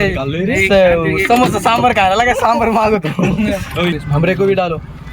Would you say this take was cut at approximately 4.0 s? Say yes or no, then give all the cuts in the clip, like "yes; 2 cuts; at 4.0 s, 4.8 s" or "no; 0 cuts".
yes; 1 cut; at 4.0 s